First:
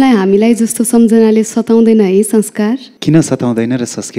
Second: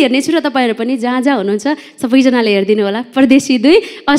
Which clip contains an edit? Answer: first; 1 cut; at 2.9 s

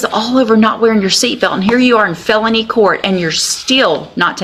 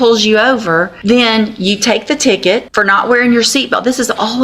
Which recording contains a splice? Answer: second; 2 cuts; at 0.9 s, 2.7 s

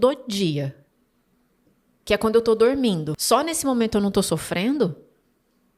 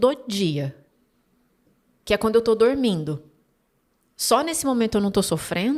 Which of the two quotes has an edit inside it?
first; 1 cut; at 3.1 s

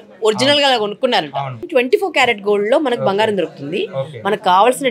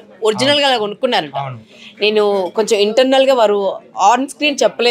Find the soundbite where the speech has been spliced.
first; 1 cut; at 1.6 s

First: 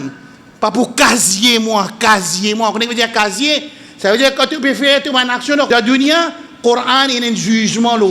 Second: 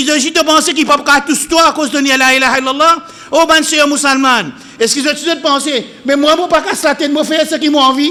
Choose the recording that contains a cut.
first; 1 cut; at 5.7 s

